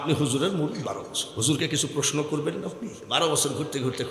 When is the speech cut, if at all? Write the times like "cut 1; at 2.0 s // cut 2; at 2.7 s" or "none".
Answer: cut 1; at 1.2 s // cut 2; at 3.0 s